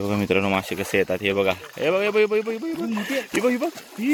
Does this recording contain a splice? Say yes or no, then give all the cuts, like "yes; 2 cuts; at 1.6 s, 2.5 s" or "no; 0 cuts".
no; 0 cuts